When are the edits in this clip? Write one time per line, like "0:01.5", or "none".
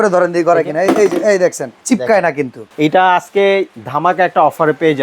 0:01.7
0:02.6
0:03.8